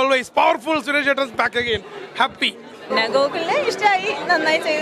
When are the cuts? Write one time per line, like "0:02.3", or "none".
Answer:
0:02.8

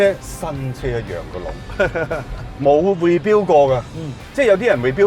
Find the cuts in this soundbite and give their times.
none

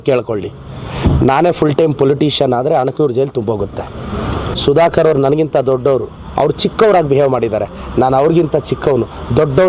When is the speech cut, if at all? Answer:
0:04.4

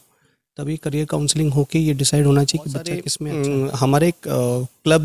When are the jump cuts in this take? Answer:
0:03.1

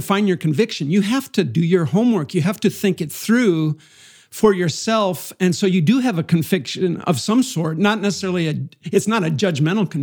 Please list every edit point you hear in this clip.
none

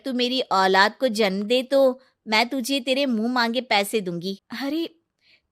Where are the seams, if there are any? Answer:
0:04.5

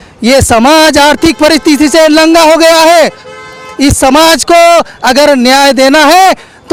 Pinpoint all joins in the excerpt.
none

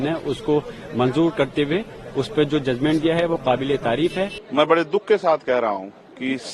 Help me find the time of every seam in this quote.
0:04.4

